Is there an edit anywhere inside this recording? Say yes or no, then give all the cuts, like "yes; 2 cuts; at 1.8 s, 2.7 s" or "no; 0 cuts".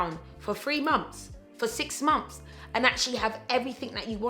no; 0 cuts